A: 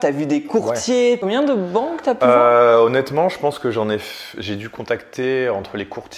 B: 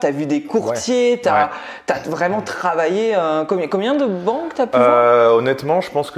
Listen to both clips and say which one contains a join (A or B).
A